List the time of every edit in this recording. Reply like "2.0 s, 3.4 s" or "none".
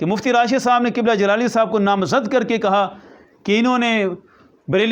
none